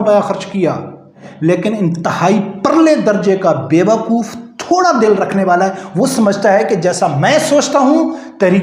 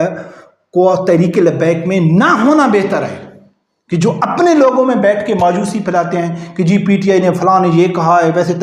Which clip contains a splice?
first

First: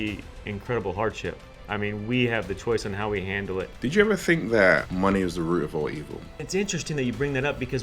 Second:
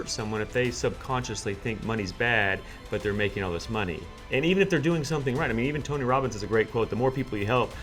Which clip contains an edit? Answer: first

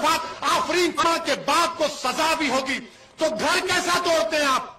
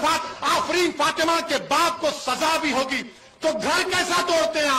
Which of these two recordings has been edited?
first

